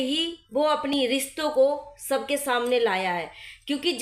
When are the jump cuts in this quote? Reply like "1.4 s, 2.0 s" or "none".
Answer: 0.9 s